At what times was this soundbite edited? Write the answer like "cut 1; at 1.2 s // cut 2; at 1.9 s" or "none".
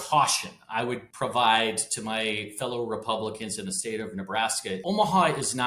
cut 1; at 1.1 s // cut 2; at 4.8 s

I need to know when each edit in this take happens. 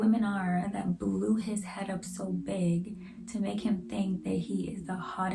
none

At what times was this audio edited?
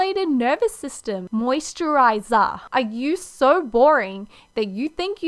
cut 1; at 1.2 s

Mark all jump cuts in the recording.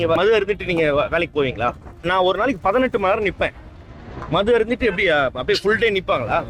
cut 1; at 2.0 s

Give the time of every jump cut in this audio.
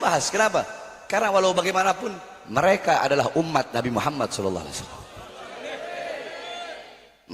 none

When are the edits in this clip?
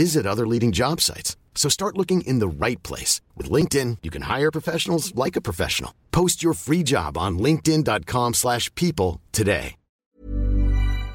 cut 1; at 10.2 s

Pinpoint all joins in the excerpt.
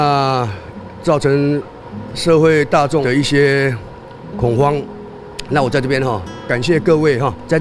cut 1; at 6.5 s

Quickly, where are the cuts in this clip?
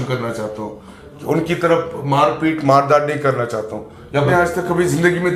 cut 1; at 4.3 s

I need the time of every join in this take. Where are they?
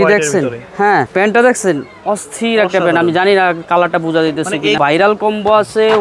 cut 1; at 1.1 s // cut 2; at 4.8 s

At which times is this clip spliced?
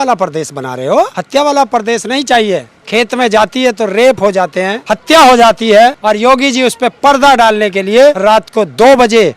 cut 1; at 1.2 s // cut 2; at 2.8 s // cut 3; at 4.8 s // cut 4; at 6.0 s // cut 5; at 8.2 s

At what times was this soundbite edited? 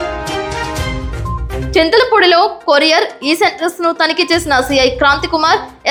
none

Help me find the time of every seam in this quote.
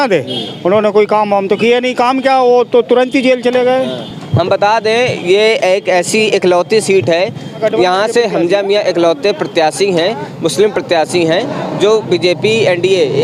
none

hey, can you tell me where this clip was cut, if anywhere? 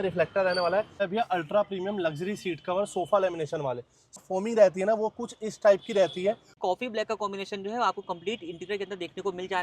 cut 1; at 1.0 s // cut 2; at 4.2 s // cut 3; at 6.5 s

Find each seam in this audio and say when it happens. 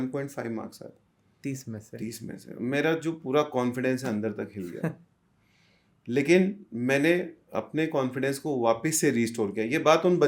none

